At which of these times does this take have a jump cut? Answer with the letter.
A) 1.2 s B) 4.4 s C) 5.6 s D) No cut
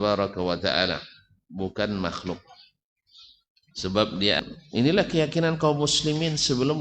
B